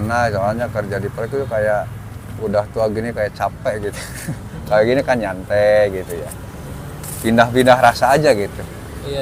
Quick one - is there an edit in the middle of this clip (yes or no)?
no